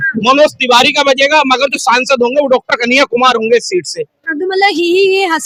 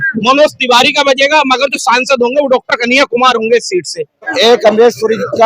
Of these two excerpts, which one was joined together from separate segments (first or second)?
second